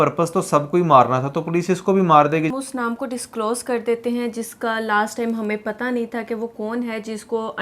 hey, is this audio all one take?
no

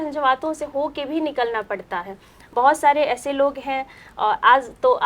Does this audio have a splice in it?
no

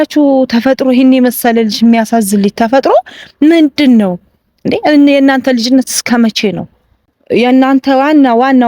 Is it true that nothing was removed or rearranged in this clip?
no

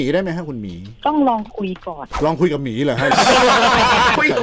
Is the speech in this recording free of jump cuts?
yes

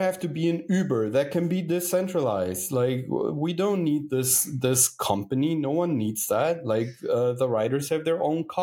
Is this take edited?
no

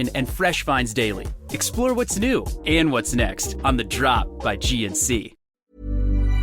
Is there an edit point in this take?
yes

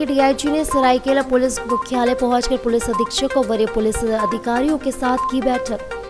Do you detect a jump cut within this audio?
no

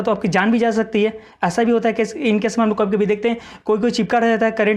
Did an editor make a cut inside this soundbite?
no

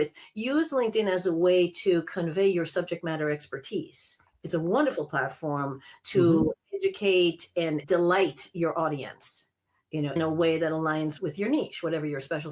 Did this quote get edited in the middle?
yes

